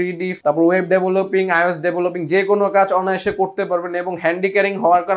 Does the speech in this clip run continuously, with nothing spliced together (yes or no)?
yes